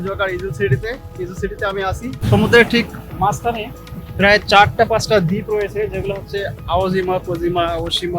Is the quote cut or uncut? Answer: cut